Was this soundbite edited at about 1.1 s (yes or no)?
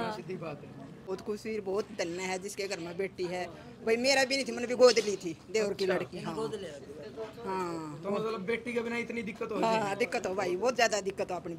yes